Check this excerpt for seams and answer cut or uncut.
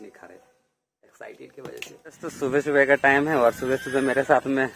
cut